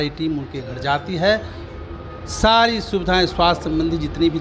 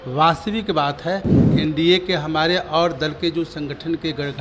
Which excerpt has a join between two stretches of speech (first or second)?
second